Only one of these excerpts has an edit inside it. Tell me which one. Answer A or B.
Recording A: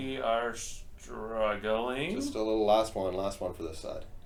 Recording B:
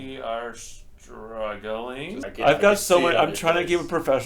B